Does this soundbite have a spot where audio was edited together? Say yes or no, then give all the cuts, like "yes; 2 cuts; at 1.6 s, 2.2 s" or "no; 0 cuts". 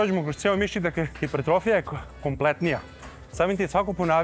yes; 1 cut; at 1.2 s